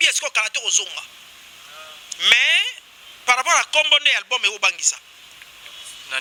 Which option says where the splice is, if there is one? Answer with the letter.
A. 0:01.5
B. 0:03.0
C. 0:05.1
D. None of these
D